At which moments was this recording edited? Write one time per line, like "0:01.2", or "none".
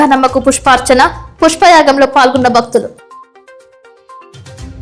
none